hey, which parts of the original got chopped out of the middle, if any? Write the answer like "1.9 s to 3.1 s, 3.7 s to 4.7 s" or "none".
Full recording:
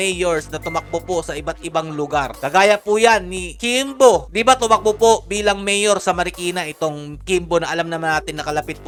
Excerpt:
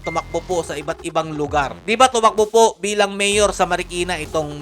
2.4 s to 4.3 s